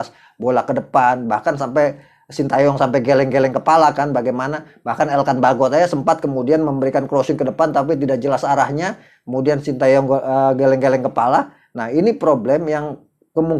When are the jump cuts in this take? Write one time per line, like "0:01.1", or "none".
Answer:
none